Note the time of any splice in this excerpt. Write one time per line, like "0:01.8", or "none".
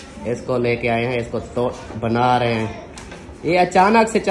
none